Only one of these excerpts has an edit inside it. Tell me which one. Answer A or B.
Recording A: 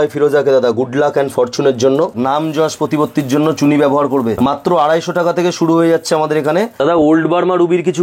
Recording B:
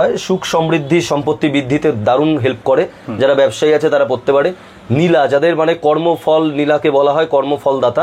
A